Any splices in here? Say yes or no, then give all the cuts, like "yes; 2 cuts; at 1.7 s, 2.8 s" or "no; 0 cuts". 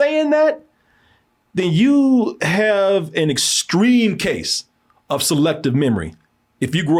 no; 0 cuts